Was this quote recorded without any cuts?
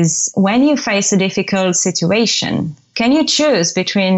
yes; 0 cuts

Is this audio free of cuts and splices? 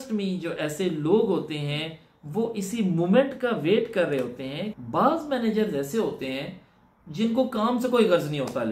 no; 1 cut; at 4.7 s

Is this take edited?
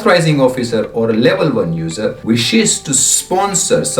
yes; 1 cut; at 2.2 s

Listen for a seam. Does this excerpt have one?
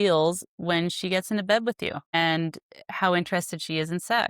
yes; 1 cut; at 2.0 s

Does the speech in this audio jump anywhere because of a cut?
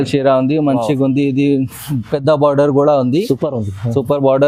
no; 0 cuts

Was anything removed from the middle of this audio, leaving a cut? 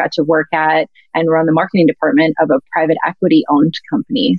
no; 0 cuts

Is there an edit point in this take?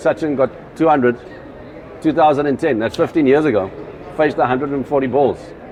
no; 0 cuts

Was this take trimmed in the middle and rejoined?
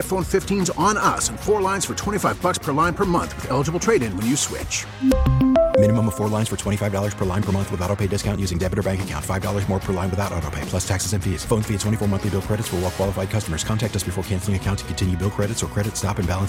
no; 0 cuts

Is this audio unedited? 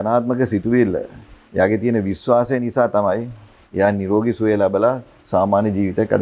yes; 0 cuts

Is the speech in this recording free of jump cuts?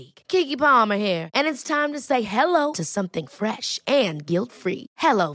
yes; 0 cuts

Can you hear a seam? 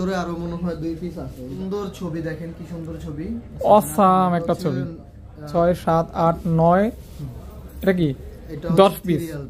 yes; 2 cuts; at 1.6 s, 5.4 s

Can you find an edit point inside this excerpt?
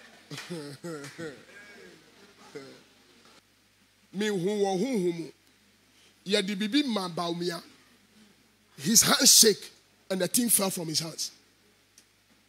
yes; 1 cut; at 3.4 s

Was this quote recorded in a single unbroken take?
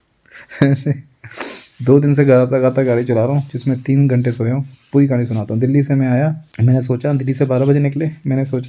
yes; 0 cuts

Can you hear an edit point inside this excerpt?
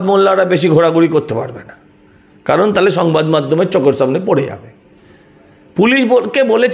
no; 0 cuts

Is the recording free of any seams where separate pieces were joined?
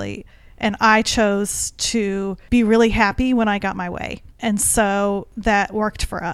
no; 2 cuts; at 2.4 s, 5.3 s

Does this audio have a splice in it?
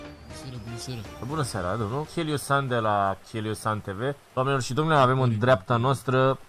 yes; 1 cut; at 2.1 s

